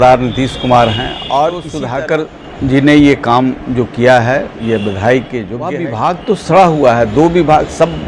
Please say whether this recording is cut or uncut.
cut